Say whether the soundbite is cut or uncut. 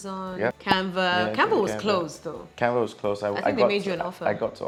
uncut